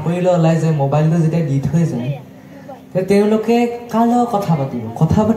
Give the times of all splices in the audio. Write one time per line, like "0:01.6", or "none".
none

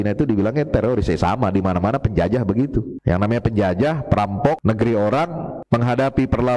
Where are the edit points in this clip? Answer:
0:02.9
0:04.6
0:05.5

